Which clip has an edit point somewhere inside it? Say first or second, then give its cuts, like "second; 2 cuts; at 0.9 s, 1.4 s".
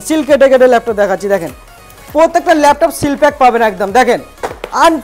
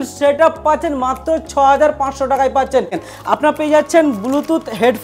second; 1 cut; at 3.1 s